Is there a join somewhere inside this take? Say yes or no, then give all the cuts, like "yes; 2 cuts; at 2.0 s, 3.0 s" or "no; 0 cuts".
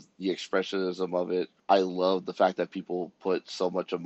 yes; 1 cut; at 1.5 s